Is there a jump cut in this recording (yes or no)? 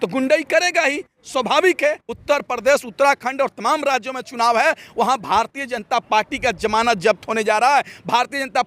yes